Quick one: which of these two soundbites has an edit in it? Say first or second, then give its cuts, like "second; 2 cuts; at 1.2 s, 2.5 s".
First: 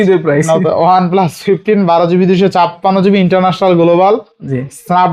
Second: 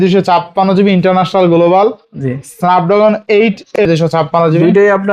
second; 1 cut; at 3.8 s